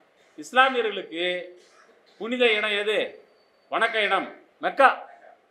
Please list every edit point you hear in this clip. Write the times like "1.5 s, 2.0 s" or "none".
4.4 s